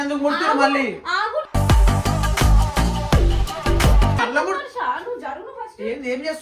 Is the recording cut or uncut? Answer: cut